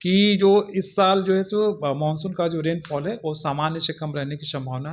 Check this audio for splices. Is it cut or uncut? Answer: uncut